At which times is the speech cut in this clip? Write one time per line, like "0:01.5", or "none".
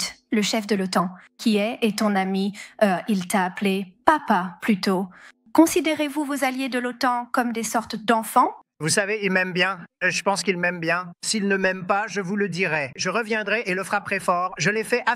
none